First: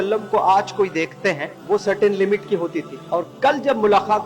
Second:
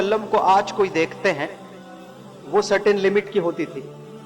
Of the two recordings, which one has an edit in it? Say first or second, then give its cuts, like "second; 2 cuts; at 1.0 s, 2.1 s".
first; 2 cuts; at 1.5 s, 2.9 s